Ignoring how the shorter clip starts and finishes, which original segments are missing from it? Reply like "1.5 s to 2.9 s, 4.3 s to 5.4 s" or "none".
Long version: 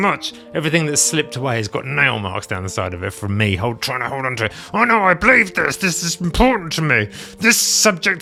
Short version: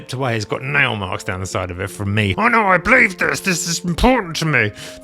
3.6 s to 4.7 s